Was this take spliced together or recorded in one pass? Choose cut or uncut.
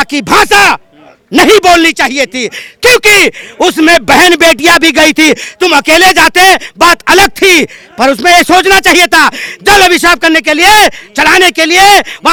uncut